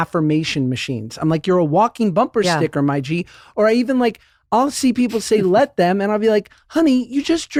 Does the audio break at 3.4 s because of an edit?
no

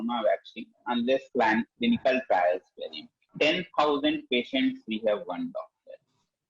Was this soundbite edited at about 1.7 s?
no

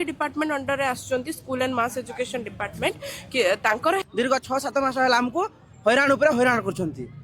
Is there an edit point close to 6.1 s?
no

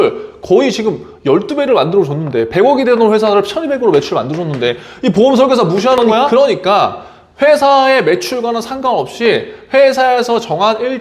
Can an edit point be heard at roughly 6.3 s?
yes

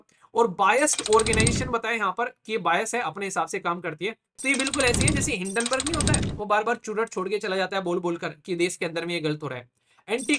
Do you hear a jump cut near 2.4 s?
no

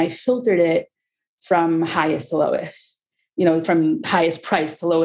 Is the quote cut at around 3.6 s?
yes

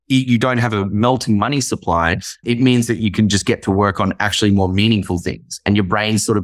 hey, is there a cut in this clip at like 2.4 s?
yes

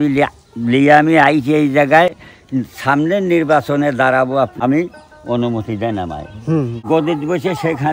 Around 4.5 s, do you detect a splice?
yes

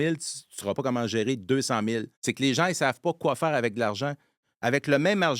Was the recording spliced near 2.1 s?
yes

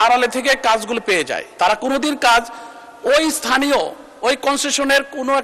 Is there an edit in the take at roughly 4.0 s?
no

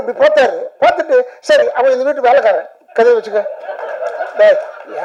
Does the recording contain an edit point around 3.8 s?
no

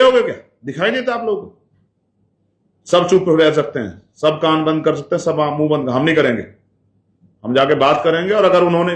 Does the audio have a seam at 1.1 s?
no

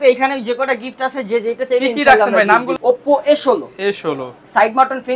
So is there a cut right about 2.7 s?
yes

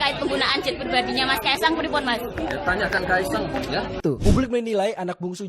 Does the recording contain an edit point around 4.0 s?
yes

